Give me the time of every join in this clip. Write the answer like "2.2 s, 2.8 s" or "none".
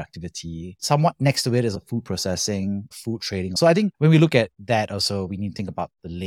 1.8 s, 3.5 s